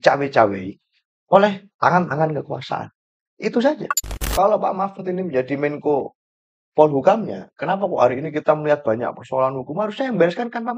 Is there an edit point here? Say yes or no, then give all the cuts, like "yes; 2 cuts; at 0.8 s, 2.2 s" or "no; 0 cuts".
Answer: yes; 1 cut; at 4.2 s